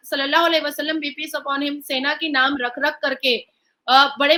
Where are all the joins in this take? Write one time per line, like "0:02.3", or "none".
none